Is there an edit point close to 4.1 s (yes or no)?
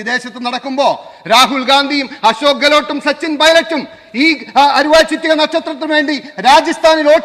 no